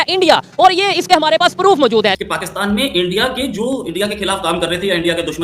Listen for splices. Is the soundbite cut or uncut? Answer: cut